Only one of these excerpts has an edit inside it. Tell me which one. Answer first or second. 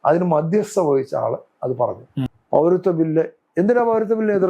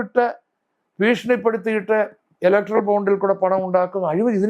first